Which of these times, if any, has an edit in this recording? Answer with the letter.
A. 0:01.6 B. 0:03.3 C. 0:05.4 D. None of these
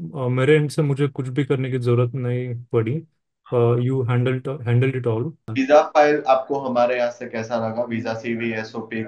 C